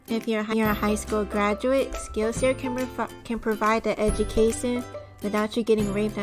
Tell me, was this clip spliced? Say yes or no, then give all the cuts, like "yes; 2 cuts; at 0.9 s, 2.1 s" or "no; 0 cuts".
yes; 2 cuts; at 2.0 s, 5.3 s